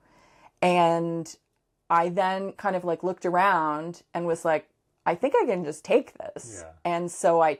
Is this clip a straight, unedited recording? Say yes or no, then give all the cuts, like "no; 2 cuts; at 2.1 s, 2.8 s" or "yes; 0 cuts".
yes; 0 cuts